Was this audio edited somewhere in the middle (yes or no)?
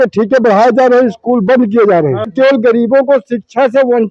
yes